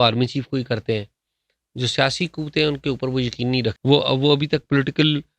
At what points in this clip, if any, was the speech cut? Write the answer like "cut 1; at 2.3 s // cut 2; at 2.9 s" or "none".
cut 1; at 3.8 s